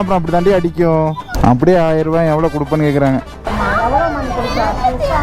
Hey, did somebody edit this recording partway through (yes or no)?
yes